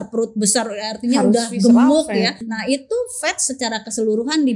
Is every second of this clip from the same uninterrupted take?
no; 1 cut; at 2.4 s

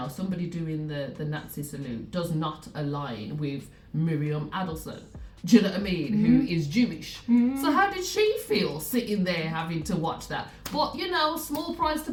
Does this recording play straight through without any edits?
yes; 0 cuts

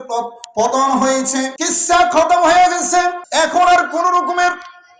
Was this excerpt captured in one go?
no; 2 cuts; at 1.6 s, 3.2 s

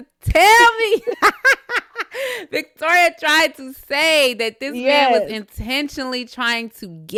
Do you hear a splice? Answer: no; 0 cuts

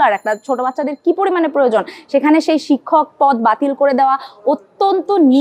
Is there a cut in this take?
no; 0 cuts

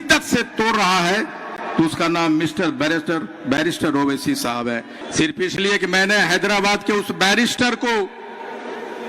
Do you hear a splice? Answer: yes; 1 cut; at 5.0 s

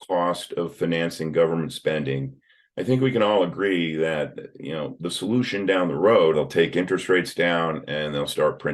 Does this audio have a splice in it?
yes; 1 cut; at 6.3 s

